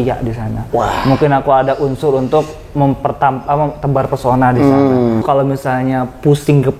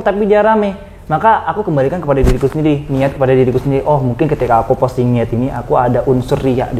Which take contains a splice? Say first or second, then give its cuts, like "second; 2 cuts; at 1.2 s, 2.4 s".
first; 1 cut; at 5.2 s